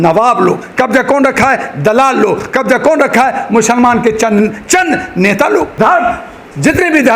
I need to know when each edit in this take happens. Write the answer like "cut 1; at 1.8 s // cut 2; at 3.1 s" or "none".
cut 1; at 5.8 s